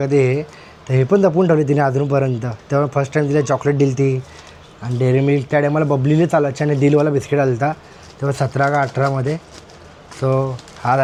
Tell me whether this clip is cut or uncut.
uncut